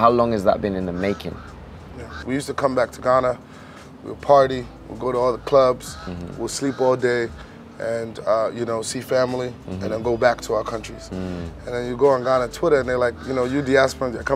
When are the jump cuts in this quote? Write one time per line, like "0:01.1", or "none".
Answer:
0:02.2